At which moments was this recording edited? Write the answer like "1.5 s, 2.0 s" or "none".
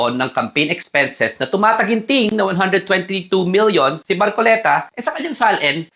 4.0 s